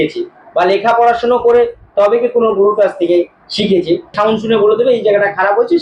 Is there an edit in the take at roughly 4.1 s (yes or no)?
yes